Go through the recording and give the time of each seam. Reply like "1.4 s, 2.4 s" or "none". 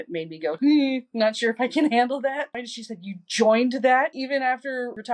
2.5 s

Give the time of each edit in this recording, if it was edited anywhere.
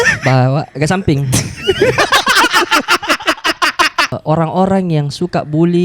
4.1 s

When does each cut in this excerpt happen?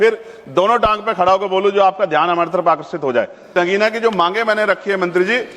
3.4 s

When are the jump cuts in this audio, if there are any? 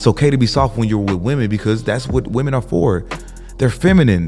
none

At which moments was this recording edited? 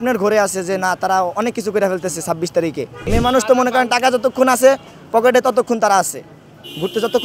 3.1 s

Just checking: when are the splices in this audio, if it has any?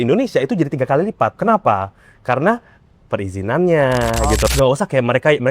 4.5 s

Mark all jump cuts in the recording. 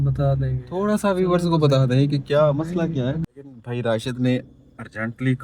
3.2 s

